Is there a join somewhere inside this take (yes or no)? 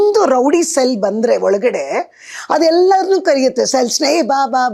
no